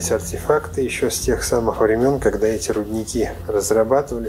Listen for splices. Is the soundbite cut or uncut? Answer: cut